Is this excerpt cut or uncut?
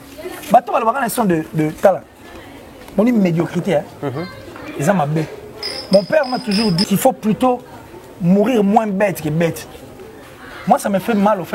cut